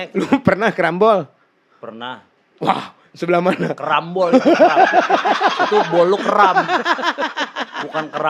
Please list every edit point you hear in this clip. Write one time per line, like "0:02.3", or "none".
none